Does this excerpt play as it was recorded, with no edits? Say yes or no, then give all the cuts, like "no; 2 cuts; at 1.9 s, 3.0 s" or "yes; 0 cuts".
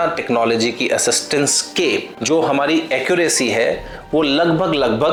yes; 0 cuts